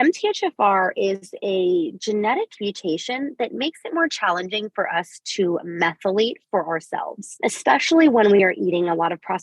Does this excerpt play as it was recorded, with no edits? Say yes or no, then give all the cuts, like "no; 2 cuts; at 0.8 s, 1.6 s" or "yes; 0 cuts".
no; 1 cut; at 7.4 s